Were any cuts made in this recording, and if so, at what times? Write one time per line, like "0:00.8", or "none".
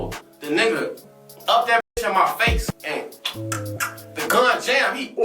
0:02.7